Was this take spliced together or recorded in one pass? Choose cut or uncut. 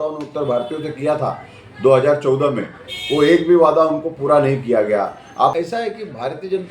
cut